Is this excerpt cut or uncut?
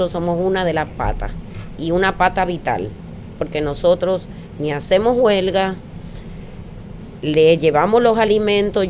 uncut